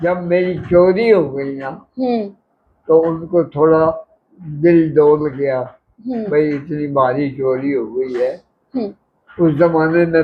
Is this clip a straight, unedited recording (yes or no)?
yes